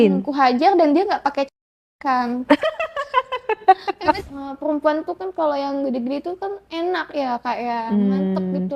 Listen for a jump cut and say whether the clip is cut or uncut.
cut